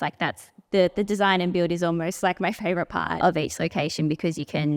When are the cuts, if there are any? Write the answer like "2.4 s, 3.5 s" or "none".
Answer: 3.2 s